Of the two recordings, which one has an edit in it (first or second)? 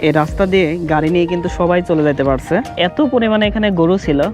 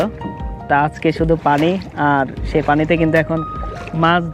first